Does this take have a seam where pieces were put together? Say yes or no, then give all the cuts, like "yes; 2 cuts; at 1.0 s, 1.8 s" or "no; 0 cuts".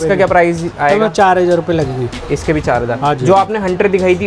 no; 0 cuts